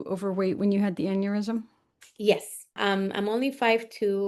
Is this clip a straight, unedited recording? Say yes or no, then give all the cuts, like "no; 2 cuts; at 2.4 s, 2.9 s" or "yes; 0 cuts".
no; 1 cut; at 2.7 s